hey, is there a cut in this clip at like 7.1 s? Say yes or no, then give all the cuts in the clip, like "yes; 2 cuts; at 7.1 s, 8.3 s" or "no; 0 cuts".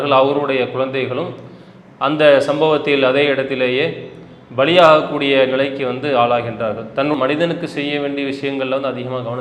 yes; 1 cut; at 7.1 s